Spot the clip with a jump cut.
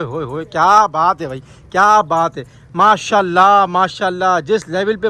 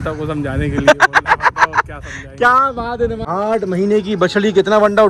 second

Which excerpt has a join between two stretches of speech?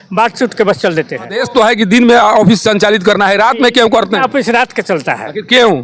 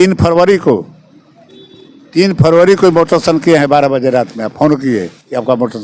first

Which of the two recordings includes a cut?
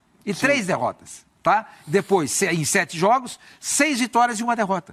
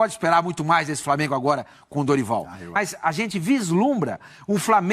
second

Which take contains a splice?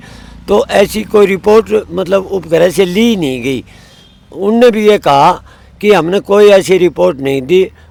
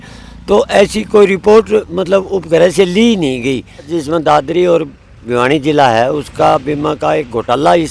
second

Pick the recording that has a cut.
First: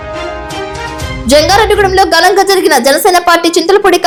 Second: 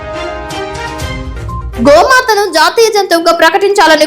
second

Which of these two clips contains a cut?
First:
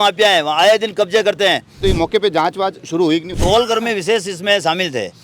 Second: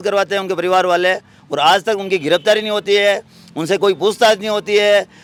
first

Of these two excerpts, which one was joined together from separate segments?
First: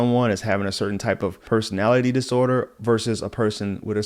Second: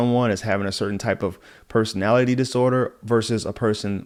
first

